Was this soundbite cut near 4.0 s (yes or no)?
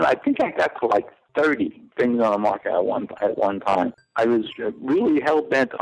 yes